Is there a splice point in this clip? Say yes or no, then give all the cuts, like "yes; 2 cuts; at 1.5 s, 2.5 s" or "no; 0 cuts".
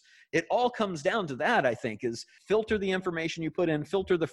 yes; 1 cut; at 2.3 s